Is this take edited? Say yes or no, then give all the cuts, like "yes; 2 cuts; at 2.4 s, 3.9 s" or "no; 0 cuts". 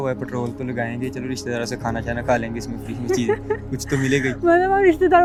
no; 0 cuts